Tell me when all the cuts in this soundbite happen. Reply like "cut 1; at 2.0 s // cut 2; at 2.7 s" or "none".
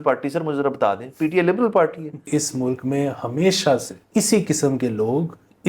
cut 1; at 2.3 s // cut 2; at 4.0 s